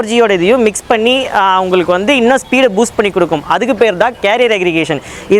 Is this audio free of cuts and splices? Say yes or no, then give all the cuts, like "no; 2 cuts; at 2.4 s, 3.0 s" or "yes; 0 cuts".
yes; 0 cuts